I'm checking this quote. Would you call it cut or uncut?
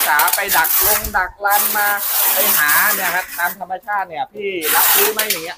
uncut